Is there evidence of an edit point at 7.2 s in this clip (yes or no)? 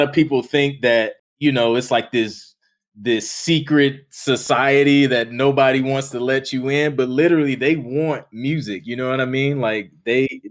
no